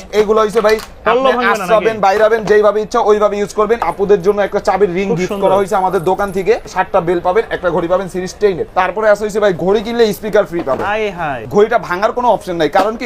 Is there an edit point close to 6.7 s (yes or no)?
yes